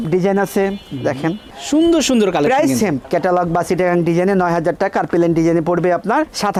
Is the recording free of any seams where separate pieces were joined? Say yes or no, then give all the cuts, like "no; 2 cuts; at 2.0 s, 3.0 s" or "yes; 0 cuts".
yes; 0 cuts